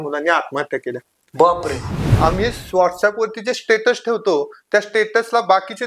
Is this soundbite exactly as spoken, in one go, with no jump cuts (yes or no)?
no